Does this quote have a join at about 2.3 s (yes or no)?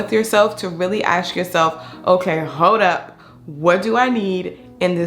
no